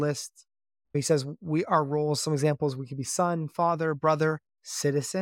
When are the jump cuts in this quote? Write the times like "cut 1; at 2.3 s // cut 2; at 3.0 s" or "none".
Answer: cut 1; at 0.9 s

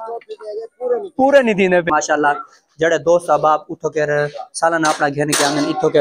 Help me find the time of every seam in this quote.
cut 1; at 1.9 s

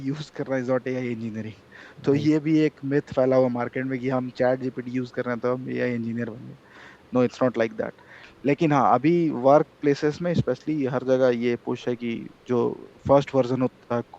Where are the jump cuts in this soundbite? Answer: none

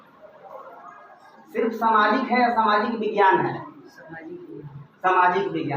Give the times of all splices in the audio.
cut 1; at 1.3 s

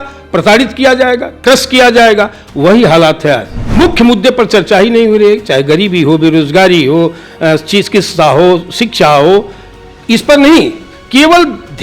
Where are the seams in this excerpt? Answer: cut 1; at 3.6 s

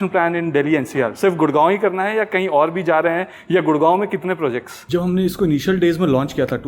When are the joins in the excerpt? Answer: cut 1; at 4.7 s

